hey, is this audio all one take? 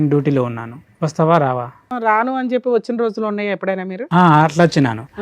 no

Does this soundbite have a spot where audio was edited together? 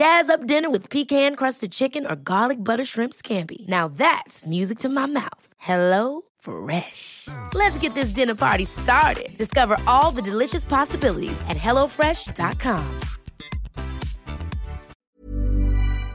yes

